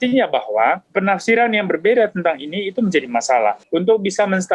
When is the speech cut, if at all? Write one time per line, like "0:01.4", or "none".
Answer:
0:00.9
0:03.6